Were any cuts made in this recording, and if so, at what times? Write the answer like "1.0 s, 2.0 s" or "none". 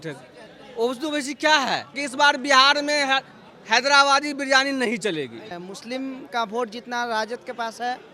2.0 s, 5.5 s

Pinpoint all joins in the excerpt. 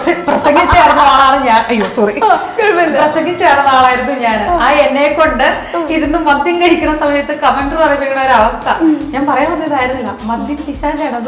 none

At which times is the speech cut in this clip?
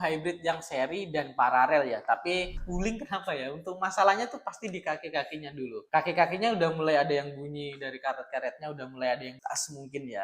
2.5 s

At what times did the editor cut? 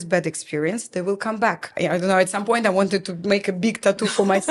1.7 s

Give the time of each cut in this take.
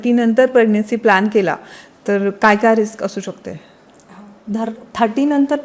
none

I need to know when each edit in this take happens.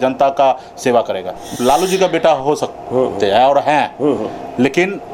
1.5 s

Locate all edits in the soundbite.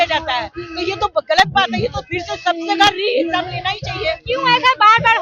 none

